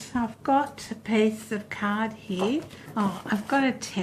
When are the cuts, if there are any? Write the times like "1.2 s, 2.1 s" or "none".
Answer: 2.8 s